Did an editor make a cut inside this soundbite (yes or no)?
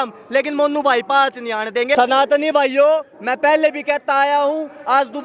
yes